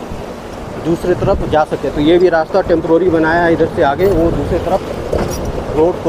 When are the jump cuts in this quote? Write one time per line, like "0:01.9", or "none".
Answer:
none